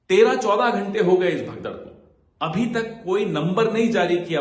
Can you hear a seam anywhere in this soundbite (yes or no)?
no